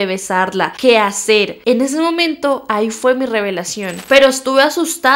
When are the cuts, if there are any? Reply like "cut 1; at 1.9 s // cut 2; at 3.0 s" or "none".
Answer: cut 1; at 4.0 s